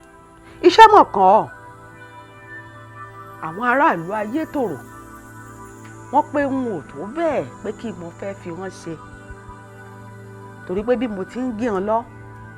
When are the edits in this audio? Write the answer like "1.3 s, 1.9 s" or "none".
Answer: 9.0 s, 10.6 s